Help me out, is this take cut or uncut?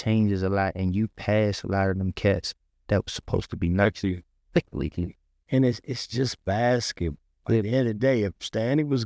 cut